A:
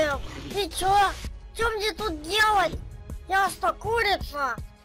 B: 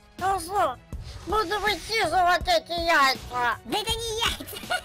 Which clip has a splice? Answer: B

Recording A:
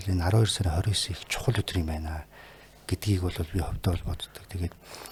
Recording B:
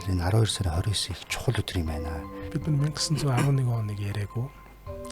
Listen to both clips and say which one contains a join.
B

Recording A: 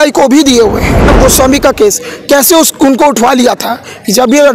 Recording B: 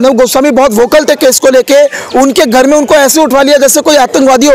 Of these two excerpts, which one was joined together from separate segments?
A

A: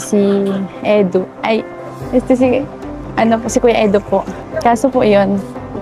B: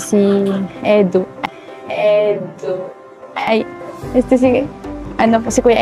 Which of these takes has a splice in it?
A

